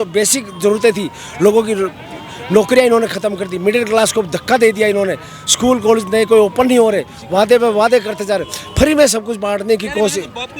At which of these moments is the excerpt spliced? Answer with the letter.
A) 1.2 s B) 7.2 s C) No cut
C